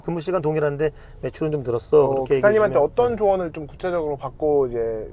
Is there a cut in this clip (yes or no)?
no